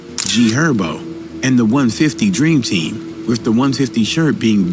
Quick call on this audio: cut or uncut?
uncut